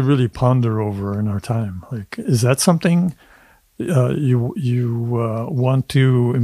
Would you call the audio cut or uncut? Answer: uncut